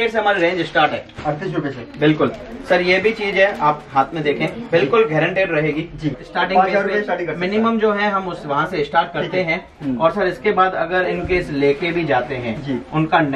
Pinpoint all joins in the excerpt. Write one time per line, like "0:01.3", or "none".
0:06.2